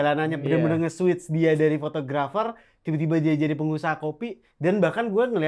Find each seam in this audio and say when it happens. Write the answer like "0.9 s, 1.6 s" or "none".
none